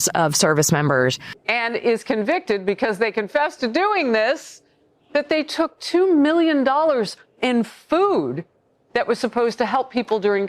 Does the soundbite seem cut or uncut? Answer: cut